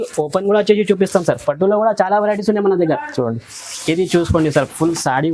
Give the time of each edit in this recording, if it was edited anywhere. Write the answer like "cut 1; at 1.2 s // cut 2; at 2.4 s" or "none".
none